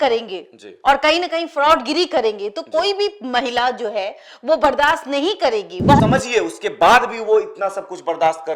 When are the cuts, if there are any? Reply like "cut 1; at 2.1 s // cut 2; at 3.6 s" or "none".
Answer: cut 1; at 6.0 s